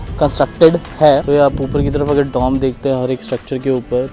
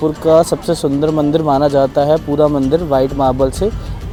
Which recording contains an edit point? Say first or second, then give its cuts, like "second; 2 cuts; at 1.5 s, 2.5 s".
first; 1 cut; at 1.2 s